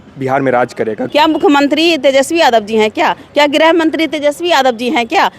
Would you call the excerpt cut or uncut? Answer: cut